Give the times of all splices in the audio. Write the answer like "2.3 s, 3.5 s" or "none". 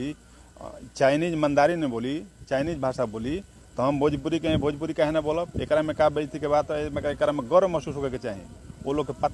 none